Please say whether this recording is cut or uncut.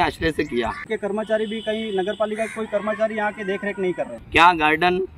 cut